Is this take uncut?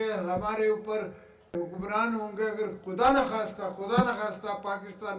no; 1 cut; at 1.5 s

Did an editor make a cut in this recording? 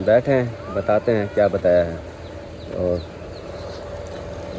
no; 0 cuts

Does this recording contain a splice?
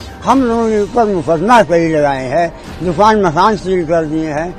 no; 0 cuts

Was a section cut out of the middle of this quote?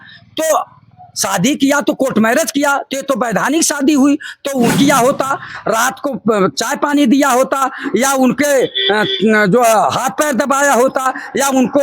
yes; 1 cut; at 4.7 s

